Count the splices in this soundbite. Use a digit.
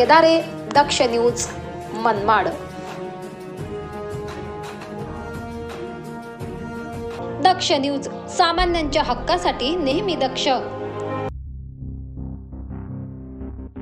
2